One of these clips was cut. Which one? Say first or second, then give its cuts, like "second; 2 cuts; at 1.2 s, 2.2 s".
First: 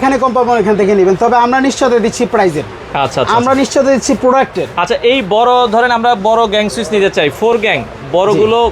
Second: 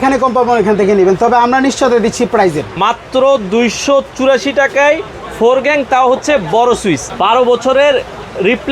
second; 2 cuts; at 2.7 s, 7.1 s